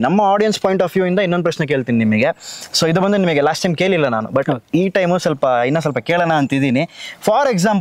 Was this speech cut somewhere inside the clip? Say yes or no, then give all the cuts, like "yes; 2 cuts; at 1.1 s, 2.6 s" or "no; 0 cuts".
no; 0 cuts